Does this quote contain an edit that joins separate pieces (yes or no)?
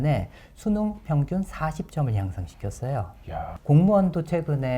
yes